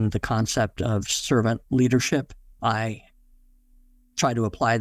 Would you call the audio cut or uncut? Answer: cut